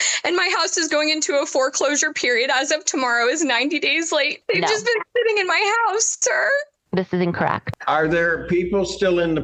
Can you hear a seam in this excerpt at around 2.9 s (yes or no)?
no